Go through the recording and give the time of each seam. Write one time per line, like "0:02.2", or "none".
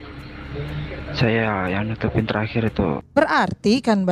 0:03.1

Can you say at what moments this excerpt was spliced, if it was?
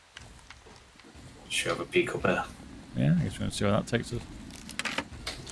0:01.0

